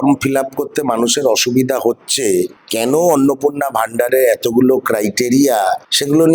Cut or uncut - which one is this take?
uncut